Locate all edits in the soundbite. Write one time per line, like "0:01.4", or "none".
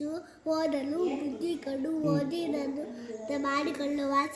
none